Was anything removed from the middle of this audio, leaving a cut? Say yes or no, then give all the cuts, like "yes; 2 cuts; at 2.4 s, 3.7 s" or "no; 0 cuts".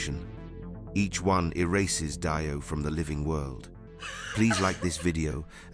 yes; 1 cut; at 4.2 s